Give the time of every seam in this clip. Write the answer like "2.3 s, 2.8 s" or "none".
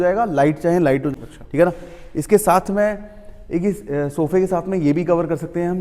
1.1 s